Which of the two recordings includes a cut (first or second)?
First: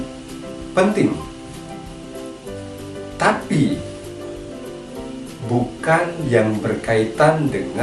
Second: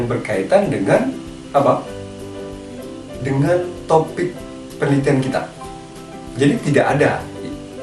first